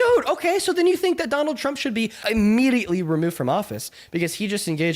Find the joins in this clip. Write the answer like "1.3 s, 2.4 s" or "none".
2.2 s